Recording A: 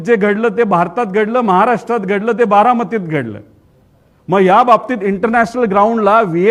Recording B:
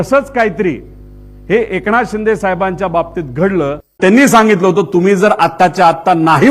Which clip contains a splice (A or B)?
B